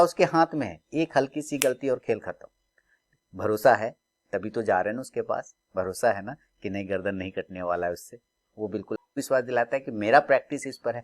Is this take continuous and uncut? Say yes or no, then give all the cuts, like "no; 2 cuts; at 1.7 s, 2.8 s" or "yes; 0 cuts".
no; 1 cut; at 9.2 s